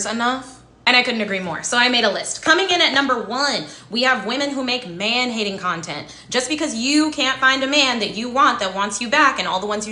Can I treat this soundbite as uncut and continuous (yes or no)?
yes